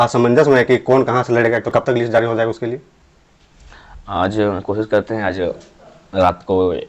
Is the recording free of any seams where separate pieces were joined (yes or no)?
yes